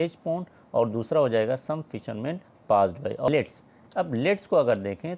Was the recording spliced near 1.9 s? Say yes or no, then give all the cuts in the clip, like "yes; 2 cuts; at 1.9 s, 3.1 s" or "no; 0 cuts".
no; 1 cut; at 3.3 s